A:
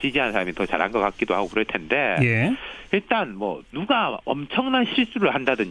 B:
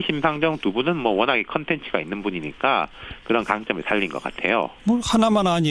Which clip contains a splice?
A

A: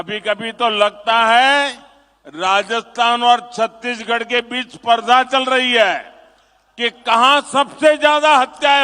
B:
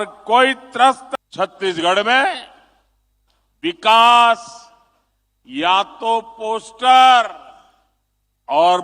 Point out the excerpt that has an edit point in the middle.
B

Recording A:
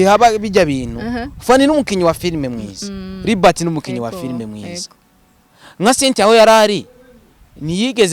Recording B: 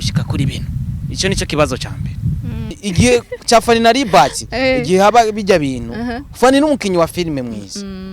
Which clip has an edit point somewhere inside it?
B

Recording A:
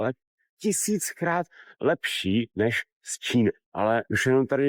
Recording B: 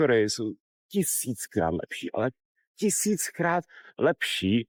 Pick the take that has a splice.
A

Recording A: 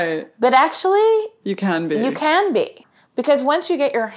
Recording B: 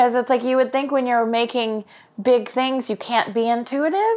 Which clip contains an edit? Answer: A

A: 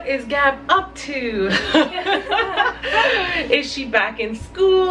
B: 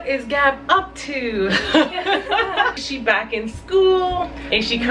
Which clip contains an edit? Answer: B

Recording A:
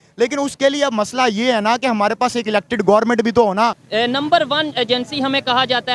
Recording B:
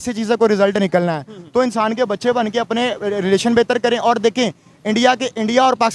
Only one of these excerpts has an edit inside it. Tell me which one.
A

